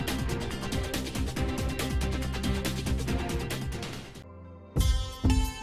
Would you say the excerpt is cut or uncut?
cut